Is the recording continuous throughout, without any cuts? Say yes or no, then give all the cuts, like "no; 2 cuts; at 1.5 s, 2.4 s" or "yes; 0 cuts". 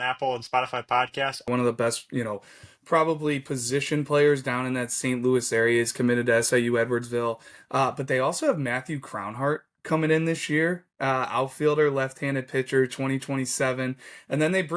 no; 1 cut; at 1.5 s